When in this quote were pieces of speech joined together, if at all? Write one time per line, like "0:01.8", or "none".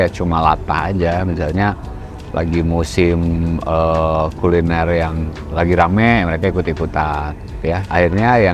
none